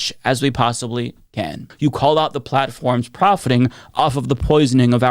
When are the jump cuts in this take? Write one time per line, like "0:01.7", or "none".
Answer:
0:01.7